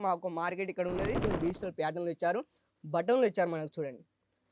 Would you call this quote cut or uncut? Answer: cut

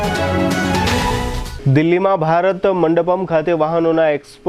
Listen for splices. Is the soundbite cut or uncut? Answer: cut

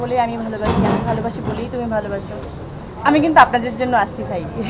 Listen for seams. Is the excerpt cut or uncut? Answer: uncut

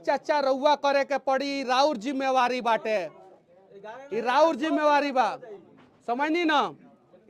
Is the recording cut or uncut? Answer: uncut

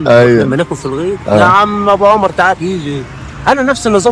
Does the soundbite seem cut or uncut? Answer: uncut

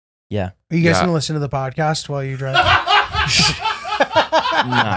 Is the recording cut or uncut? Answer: uncut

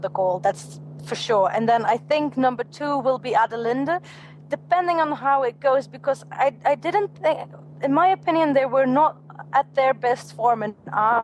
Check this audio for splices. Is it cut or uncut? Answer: uncut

